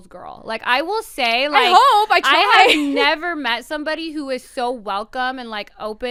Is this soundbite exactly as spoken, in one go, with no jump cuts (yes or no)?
yes